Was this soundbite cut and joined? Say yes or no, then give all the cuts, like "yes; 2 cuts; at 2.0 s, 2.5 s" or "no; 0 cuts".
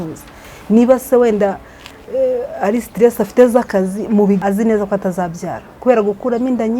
yes; 1 cut; at 4.4 s